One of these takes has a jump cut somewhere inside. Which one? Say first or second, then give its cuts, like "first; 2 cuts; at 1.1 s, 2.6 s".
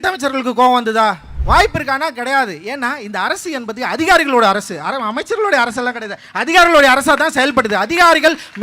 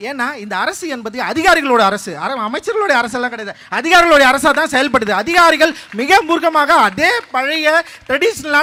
first; 1 cut; at 1.3 s